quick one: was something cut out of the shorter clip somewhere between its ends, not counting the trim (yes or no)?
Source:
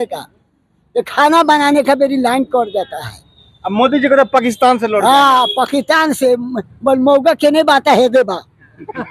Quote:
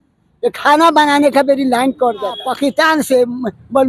yes